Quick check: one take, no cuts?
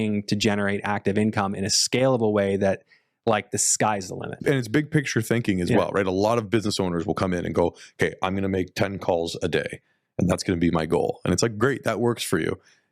no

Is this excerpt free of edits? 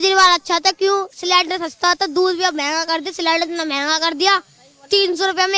yes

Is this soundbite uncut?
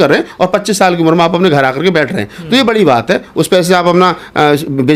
yes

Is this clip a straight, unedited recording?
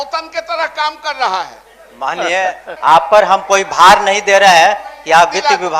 no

